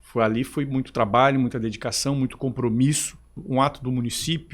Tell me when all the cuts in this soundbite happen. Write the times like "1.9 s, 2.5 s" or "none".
3.4 s